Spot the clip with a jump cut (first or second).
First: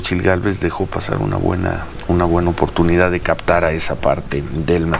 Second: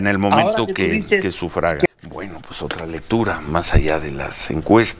second